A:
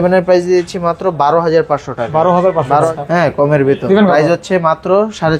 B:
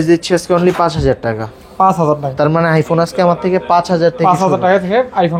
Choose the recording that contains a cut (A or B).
A